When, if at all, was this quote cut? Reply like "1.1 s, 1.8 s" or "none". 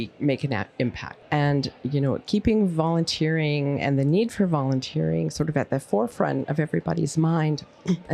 1.1 s, 6.5 s